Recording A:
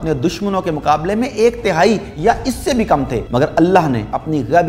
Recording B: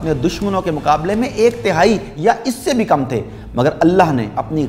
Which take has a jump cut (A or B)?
A